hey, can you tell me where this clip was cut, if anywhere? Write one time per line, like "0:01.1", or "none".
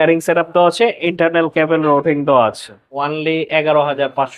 0:02.9